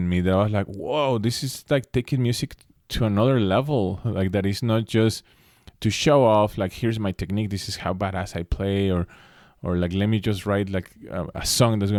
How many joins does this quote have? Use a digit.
0